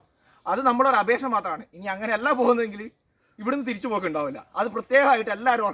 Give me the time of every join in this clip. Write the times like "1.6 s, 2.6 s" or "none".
none